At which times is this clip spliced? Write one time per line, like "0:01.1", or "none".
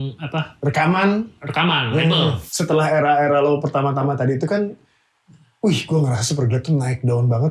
0:02.4